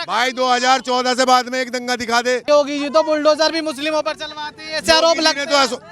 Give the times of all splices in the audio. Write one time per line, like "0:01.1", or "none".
0:02.5